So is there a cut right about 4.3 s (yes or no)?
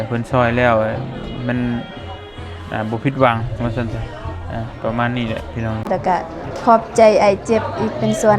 no